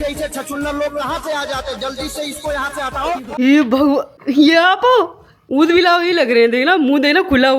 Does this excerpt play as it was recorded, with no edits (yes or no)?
no